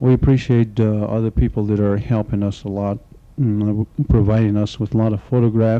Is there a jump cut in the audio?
yes; 1 cut; at 3.1 s

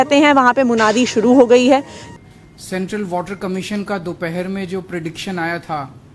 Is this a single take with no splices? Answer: no; 1 cut; at 2.0 s

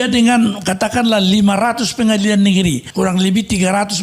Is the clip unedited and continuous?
no; 1 cut; at 2.8 s

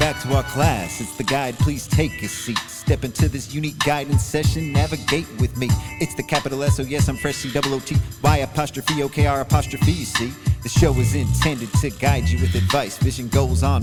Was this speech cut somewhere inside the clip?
no; 0 cuts

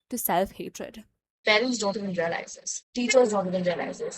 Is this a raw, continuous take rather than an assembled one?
no; 1 cut; at 1.4 s

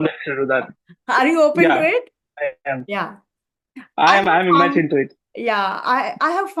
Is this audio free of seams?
yes; 0 cuts

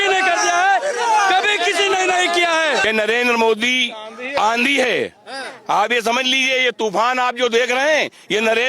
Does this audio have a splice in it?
yes; 1 cut; at 2.8 s

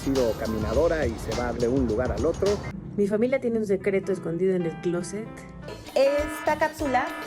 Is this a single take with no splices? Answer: no; 2 cuts; at 2.8 s, 5.7 s

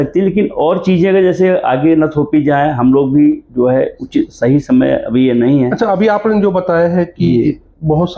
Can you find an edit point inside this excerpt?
no; 0 cuts

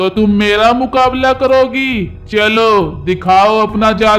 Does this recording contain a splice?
no; 0 cuts

